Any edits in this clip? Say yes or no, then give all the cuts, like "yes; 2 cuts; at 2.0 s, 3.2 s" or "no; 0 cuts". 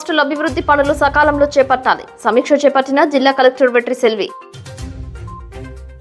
no; 0 cuts